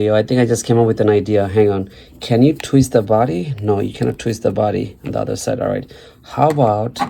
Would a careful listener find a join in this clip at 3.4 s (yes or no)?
no